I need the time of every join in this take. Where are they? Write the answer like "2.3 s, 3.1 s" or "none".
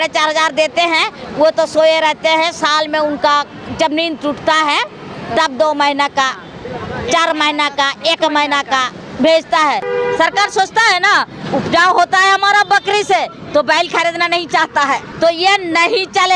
9.9 s, 15.1 s